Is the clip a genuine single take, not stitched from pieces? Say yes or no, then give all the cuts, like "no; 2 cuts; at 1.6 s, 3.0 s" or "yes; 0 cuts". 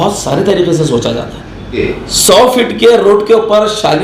no; 1 cut; at 1.8 s